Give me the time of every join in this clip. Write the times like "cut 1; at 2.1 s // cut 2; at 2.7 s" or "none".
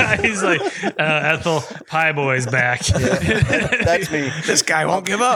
none